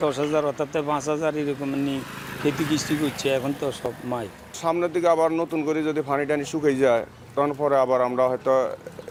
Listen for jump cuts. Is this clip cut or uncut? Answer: uncut